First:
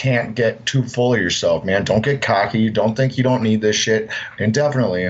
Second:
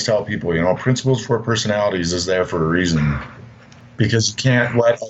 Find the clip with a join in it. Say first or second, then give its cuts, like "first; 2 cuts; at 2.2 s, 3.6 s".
second; 1 cut; at 4.0 s